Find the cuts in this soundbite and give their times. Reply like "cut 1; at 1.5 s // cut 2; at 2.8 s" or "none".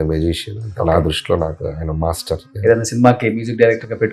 cut 1; at 2.5 s

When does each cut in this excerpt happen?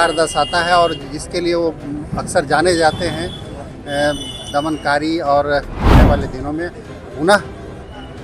cut 1; at 5.9 s

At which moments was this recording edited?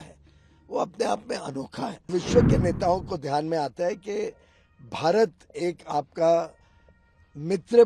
cut 1; at 2.1 s

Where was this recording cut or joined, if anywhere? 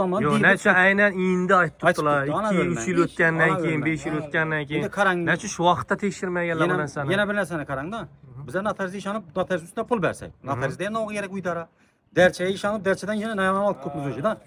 none

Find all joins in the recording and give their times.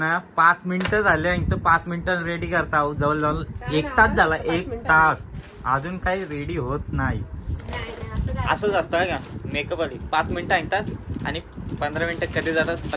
none

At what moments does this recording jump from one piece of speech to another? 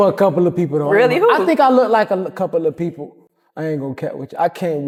none

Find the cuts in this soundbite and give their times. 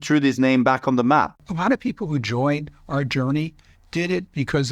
cut 1; at 1.4 s

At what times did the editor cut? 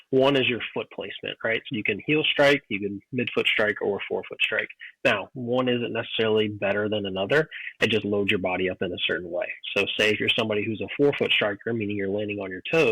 cut 1; at 1.7 s

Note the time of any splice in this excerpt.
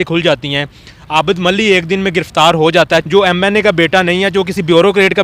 cut 1; at 3.0 s

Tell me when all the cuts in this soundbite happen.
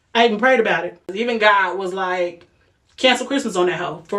cut 1; at 1.2 s

